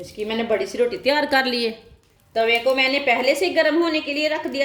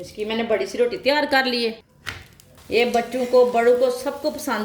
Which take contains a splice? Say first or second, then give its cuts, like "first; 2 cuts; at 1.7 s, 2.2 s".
second; 1 cut; at 2.2 s